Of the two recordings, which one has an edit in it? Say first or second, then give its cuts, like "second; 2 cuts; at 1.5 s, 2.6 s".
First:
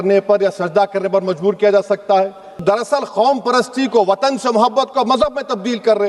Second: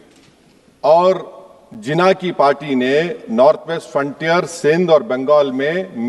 first; 1 cut; at 2.6 s